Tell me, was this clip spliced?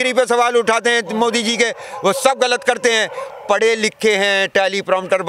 no; 0 cuts

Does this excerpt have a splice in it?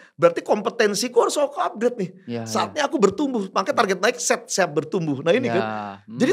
no; 0 cuts

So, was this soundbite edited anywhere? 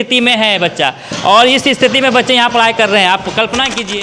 no; 0 cuts

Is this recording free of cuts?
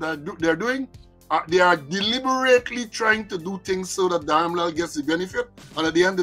yes; 0 cuts

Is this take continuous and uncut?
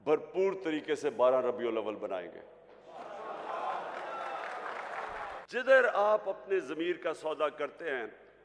no; 1 cut; at 5.4 s

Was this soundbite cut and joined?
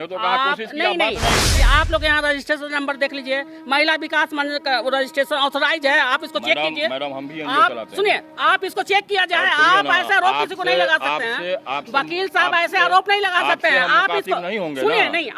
yes; 1 cut; at 1.5 s

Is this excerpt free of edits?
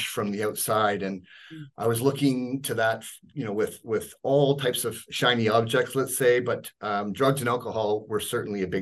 yes; 0 cuts

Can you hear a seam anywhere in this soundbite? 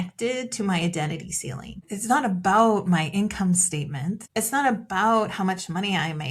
yes; 2 cuts; at 1.9 s, 4.2 s

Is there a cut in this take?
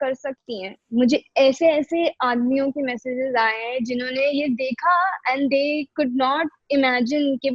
no; 0 cuts

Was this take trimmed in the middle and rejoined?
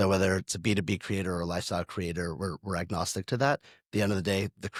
no; 0 cuts

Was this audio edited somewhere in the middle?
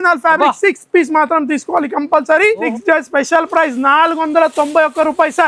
yes; 1 cut; at 2.7 s

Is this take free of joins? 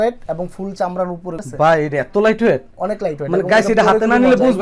no; 1 cut; at 1.4 s

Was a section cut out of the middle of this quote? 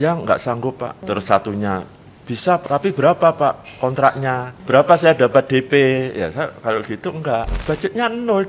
yes; 4 cuts; at 1.0 s, 2.6 s, 4.5 s, 7.5 s

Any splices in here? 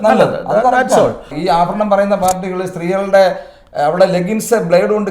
yes; 1 cut; at 1.3 s

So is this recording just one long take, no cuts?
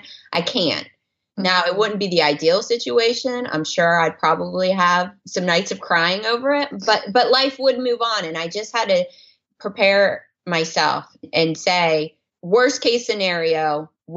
no; 1 cut; at 11.3 s

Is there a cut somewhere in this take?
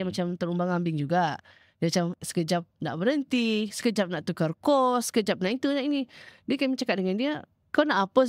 no; 0 cuts

